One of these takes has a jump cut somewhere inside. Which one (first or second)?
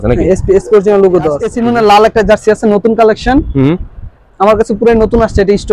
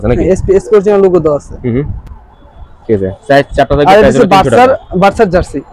first